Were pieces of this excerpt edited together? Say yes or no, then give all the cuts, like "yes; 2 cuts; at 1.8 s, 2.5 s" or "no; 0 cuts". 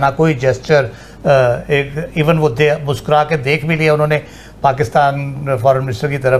no; 0 cuts